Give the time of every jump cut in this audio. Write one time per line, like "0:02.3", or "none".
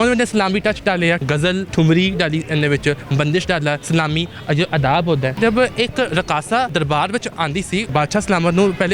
0:01.3
0:03.8
0:05.4
0:06.7
0:07.9